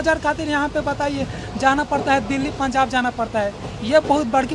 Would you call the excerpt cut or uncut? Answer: uncut